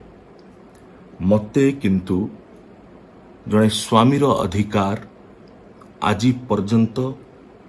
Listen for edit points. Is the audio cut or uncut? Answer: uncut